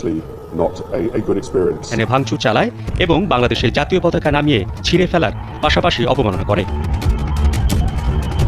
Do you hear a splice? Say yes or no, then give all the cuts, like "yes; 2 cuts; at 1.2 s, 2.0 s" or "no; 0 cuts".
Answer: yes; 1 cut; at 1.9 s